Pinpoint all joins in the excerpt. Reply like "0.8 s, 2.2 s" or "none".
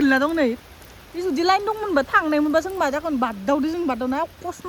none